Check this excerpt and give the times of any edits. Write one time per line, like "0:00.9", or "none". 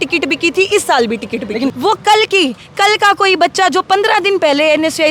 0:01.7